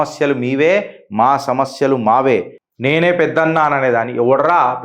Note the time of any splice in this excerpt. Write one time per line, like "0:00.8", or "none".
0:02.6